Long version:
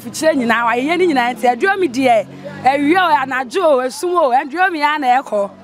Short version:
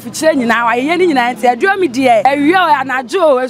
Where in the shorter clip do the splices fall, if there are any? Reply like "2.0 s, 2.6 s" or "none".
2.2 s